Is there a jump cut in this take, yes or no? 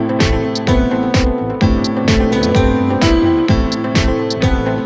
no